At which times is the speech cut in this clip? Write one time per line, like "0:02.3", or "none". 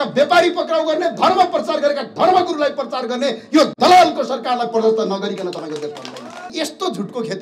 0:06.5